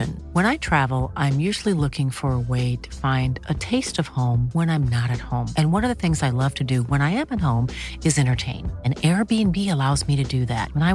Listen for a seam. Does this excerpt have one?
no; 0 cuts

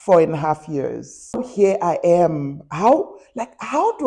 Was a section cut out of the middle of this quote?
yes; 1 cut; at 1.5 s

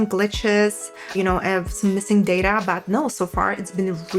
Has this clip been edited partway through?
no; 0 cuts

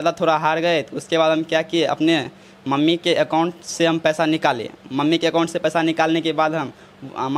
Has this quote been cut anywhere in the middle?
no; 0 cuts

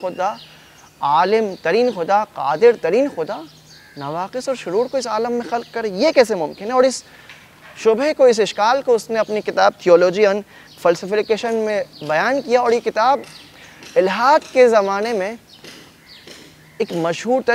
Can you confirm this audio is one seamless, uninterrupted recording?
yes; 0 cuts

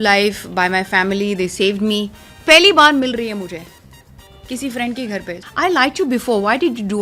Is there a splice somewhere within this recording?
yes; 2 cuts; at 2.2 s, 5.4 s

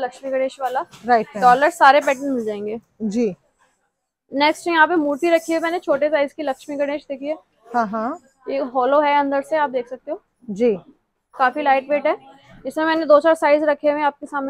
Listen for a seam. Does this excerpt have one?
no; 0 cuts

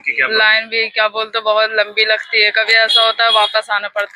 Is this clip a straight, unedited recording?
yes; 0 cuts

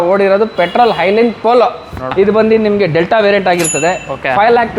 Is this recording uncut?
no; 1 cut; at 2.0 s

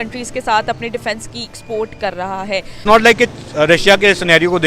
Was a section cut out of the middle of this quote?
yes; 1 cut; at 2.8 s

